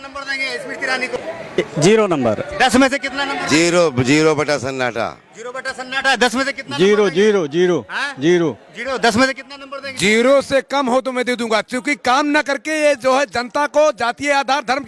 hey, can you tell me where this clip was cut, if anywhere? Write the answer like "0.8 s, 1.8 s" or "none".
1.2 s